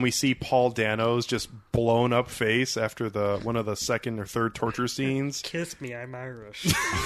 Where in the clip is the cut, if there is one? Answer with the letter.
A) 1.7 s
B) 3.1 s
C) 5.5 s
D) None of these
D